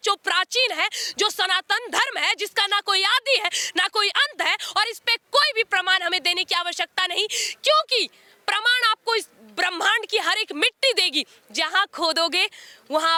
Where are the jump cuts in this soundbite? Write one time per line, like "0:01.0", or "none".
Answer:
none

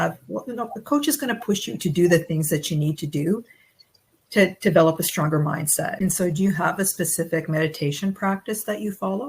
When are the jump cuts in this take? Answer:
0:05.9

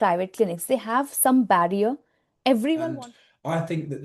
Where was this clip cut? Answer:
0:02.8

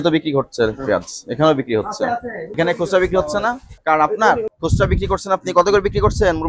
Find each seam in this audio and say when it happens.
0:03.7
0:04.5

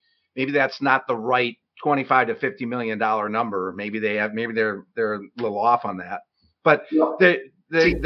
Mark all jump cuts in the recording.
none

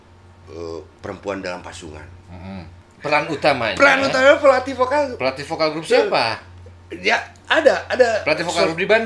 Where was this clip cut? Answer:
0:02.7

